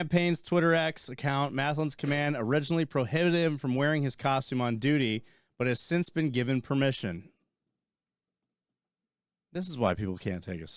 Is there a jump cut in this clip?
no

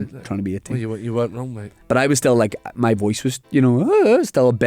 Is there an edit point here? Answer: yes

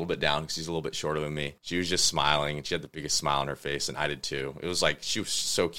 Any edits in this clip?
no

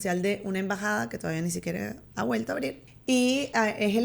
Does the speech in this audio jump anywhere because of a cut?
yes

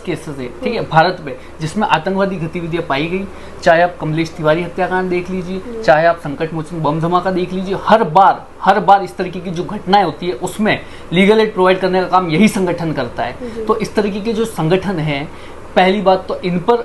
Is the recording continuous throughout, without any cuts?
yes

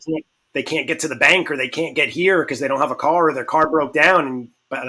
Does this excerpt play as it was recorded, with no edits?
yes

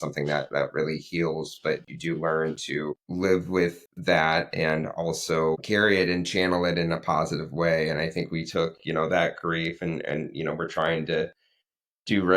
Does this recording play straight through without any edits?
no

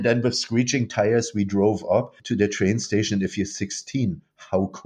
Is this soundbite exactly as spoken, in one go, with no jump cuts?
no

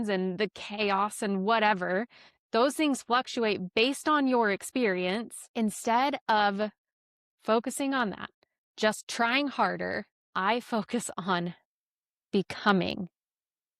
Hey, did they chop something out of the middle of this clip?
yes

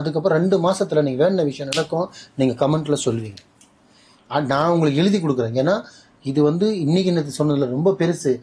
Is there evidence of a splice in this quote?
no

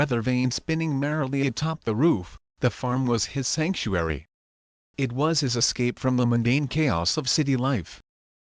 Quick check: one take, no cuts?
yes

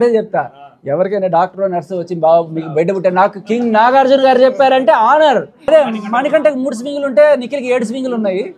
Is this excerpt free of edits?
no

